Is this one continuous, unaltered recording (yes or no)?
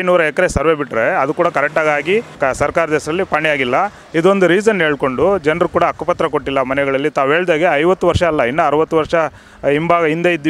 no